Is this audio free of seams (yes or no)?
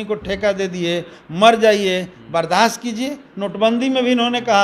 yes